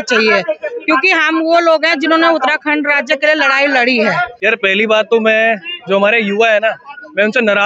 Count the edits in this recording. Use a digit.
1